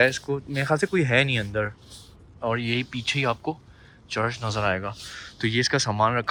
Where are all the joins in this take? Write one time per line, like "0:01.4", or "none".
none